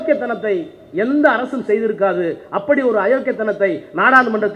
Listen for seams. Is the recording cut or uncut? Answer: uncut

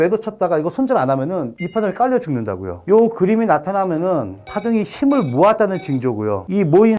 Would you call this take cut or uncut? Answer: cut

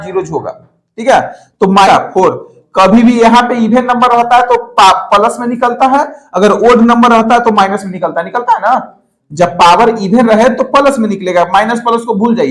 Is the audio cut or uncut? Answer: cut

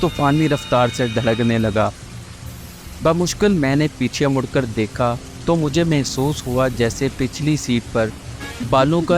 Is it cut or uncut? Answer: uncut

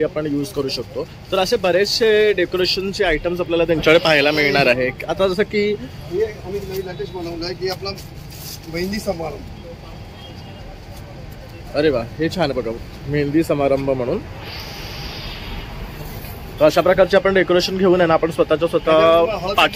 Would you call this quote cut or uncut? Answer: uncut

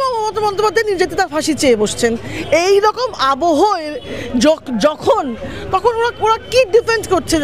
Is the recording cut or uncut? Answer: uncut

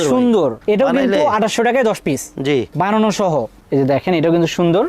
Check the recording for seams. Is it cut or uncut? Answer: cut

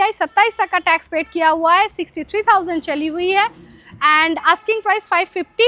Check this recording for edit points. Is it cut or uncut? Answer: uncut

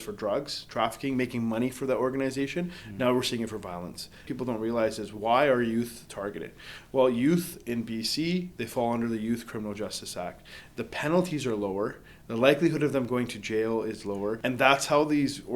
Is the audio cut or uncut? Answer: cut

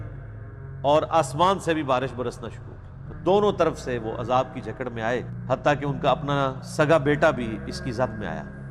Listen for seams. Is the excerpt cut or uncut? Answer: cut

